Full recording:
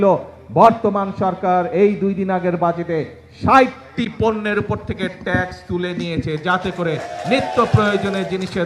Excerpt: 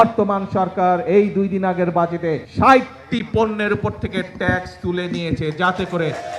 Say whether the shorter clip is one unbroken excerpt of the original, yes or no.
no